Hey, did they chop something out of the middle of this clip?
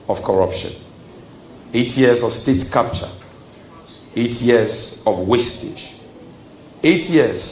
no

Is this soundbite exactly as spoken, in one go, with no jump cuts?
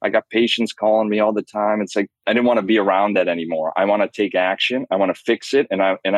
no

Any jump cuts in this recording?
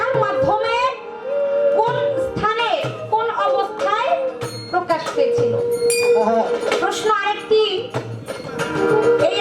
no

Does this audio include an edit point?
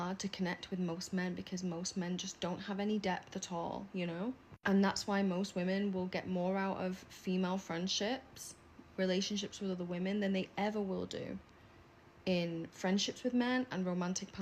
no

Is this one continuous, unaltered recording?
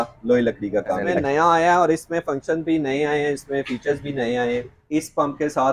no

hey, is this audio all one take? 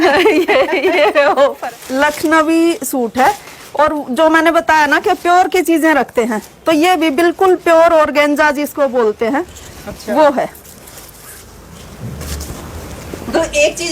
no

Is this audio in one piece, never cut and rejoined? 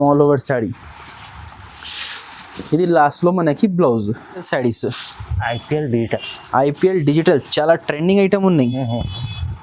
no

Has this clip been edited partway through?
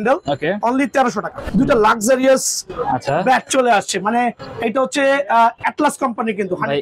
yes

